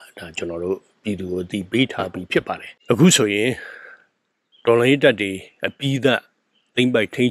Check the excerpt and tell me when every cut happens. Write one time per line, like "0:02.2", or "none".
0:02.7

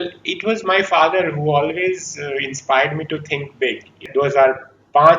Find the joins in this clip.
0:04.1

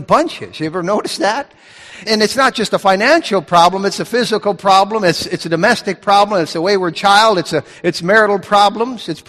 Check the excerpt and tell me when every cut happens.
0:02.0

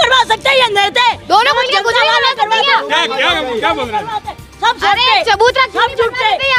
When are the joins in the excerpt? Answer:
none

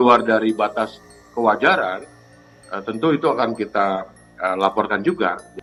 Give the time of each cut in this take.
none

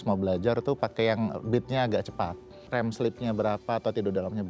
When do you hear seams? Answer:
0:02.6

